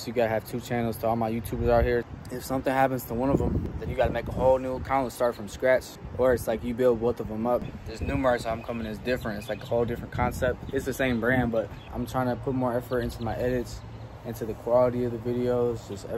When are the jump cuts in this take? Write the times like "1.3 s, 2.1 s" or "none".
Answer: 2.1 s, 3.6 s, 6.0 s, 7.7 s, 11.9 s